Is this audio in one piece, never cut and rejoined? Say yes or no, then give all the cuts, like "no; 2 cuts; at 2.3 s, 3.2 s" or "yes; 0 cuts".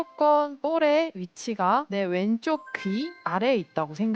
no; 2 cuts; at 1.9 s, 3.2 s